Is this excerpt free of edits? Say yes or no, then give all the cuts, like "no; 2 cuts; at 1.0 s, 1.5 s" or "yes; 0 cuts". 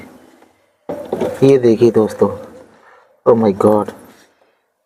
yes; 0 cuts